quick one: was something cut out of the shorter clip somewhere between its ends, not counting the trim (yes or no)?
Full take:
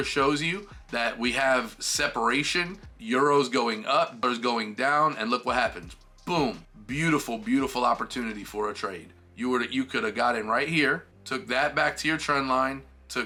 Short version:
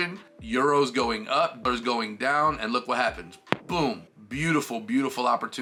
no